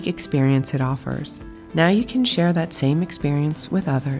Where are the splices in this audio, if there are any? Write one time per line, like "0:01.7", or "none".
none